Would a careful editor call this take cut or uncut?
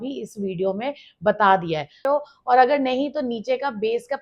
cut